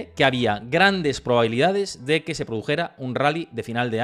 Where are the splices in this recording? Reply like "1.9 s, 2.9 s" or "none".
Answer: none